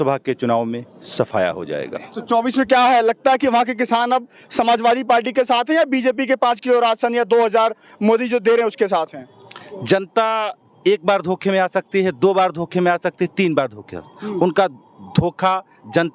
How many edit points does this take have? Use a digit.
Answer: 0